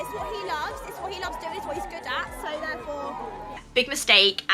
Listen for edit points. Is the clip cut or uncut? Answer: cut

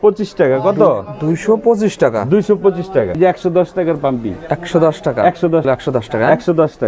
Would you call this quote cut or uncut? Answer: cut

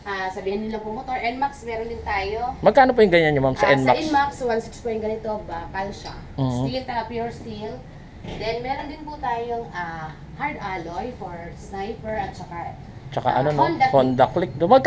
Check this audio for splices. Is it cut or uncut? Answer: uncut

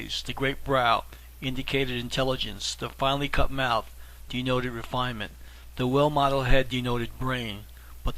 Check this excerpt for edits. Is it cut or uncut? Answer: cut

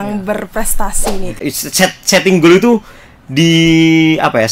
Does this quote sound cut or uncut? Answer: cut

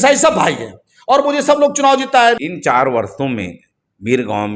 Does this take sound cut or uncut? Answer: cut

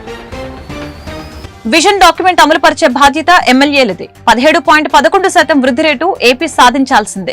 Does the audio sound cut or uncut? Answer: cut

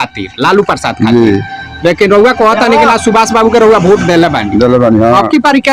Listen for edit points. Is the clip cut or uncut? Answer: uncut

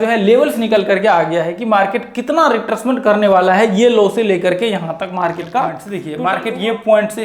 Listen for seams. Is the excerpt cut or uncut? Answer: cut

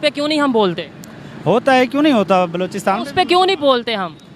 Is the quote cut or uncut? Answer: uncut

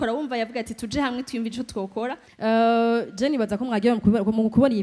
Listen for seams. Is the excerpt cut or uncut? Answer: cut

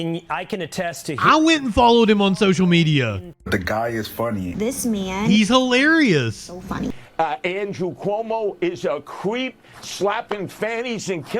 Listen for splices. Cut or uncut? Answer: cut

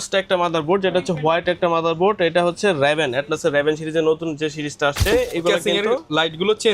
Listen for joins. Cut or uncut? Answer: cut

